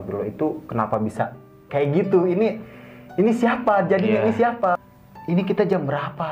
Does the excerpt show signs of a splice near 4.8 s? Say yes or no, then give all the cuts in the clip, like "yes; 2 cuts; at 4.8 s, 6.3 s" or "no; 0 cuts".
yes; 1 cut; at 4.8 s